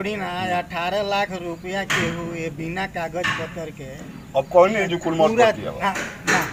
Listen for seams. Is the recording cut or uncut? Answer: uncut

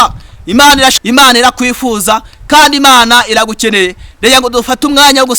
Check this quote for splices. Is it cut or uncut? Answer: cut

